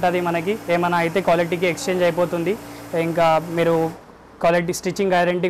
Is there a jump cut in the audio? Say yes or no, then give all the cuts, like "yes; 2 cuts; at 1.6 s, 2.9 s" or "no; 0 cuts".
no; 0 cuts